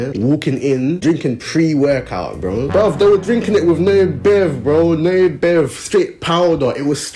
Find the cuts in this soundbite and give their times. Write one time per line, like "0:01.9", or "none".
none